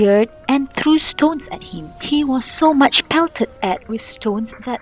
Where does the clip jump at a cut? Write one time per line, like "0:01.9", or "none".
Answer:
none